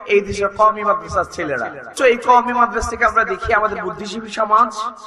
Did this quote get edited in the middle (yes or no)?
yes